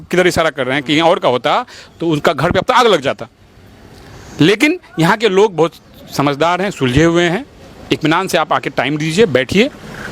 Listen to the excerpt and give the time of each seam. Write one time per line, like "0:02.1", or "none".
none